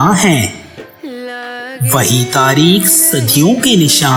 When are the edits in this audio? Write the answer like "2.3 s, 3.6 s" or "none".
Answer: none